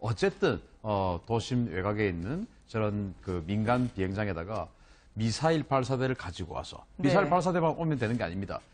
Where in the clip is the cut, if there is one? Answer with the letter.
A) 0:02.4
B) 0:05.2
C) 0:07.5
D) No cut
D